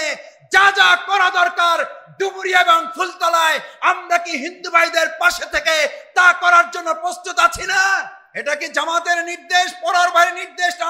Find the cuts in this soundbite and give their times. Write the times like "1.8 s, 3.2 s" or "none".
8.2 s